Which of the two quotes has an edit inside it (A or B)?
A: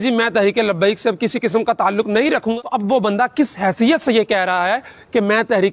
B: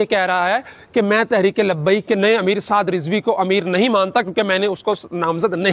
A